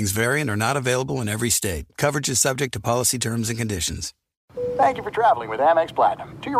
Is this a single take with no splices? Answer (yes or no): no